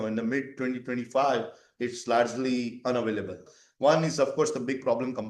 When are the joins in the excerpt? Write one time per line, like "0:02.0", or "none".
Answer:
0:03.5